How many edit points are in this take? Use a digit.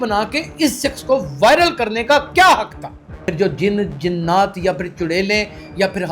1